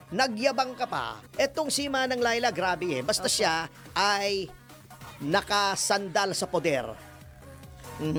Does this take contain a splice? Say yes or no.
no